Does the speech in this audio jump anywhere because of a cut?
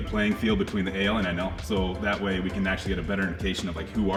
no; 0 cuts

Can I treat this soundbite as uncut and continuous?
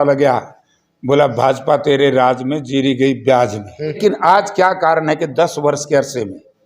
no; 1 cut; at 4.0 s

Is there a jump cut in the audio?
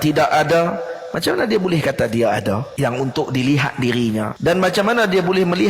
yes; 2 cuts; at 2.7 s, 4.3 s

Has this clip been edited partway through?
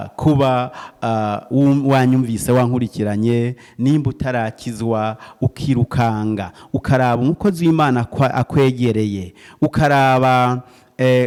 no; 0 cuts

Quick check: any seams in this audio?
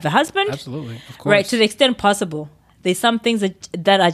no; 0 cuts

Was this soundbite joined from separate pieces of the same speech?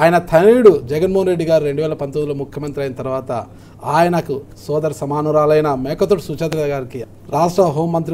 yes; 1 cut; at 7.0 s

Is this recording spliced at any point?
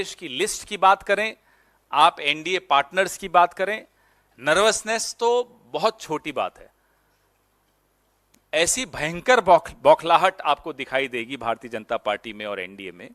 no; 0 cuts

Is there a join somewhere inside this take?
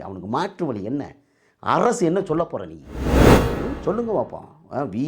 yes; 2 cuts; at 3.0 s, 3.7 s

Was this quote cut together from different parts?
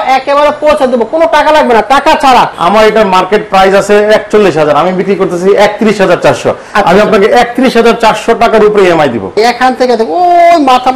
yes; 2 cuts; at 2.6 s, 9.4 s

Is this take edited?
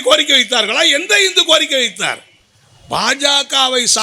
no; 0 cuts

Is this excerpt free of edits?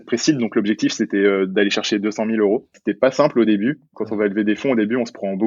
yes; 0 cuts

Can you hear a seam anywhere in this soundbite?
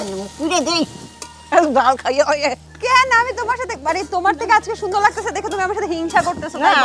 no; 0 cuts

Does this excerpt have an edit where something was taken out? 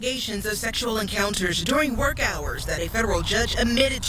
no; 0 cuts

